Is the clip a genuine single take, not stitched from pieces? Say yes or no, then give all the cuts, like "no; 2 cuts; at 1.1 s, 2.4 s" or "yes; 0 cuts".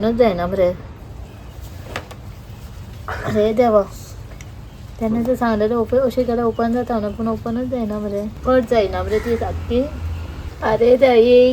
yes; 0 cuts